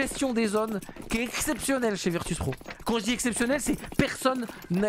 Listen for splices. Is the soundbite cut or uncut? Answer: uncut